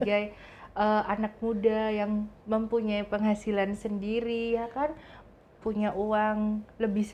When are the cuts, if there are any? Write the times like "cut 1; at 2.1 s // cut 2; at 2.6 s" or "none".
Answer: none